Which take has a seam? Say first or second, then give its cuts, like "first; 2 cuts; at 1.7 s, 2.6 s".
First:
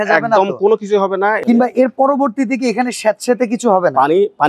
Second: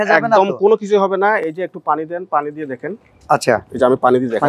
first; 1 cut; at 1.4 s